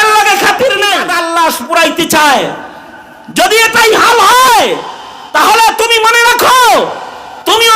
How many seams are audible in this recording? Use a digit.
1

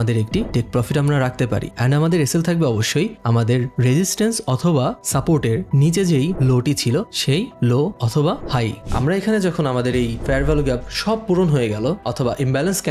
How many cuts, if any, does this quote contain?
1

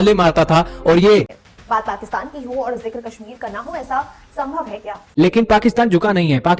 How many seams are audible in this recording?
2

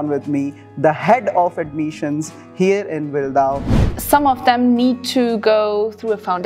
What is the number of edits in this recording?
1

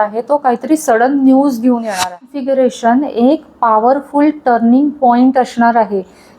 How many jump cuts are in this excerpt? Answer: 1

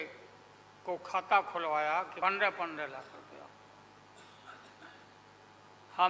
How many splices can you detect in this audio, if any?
1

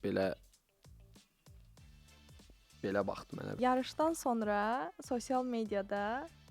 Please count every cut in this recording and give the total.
1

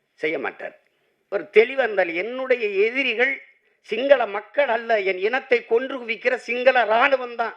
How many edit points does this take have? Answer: 1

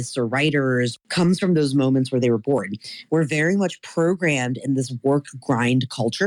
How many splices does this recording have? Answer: 2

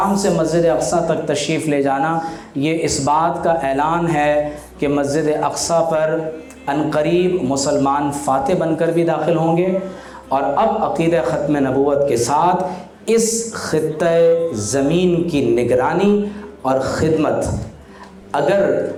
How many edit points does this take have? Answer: 0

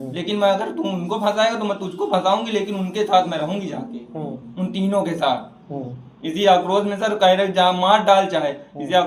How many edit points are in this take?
0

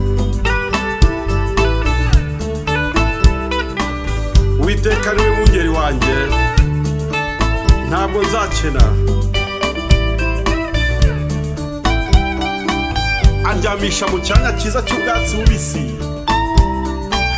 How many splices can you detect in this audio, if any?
0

